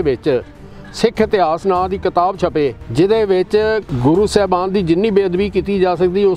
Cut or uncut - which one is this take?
cut